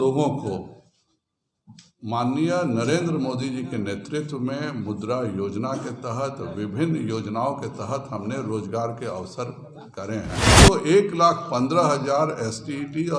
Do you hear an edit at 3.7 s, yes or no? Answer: no